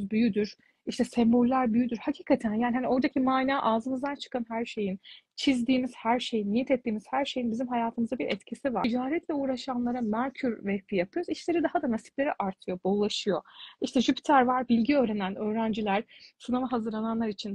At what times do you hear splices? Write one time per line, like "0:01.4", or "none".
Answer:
0:08.8